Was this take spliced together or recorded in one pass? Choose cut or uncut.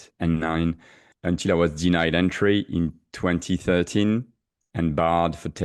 cut